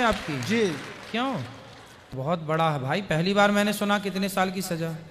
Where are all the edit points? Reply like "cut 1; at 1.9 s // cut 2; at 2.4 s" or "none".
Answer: cut 1; at 2.2 s